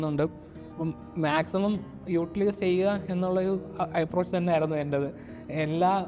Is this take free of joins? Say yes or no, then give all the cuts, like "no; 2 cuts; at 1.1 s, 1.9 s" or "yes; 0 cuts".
yes; 0 cuts